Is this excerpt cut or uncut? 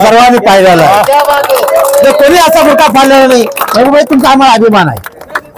uncut